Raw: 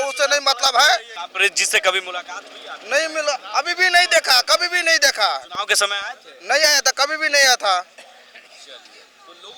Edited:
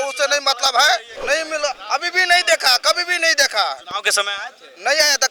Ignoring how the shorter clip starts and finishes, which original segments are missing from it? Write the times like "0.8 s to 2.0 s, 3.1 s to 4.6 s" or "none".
1.1 s to 2.8 s